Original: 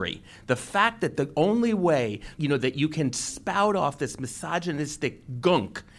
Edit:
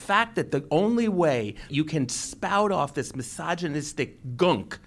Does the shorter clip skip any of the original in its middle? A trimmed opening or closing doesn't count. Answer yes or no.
yes